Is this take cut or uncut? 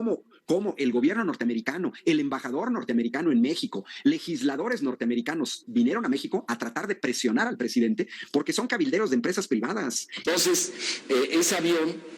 cut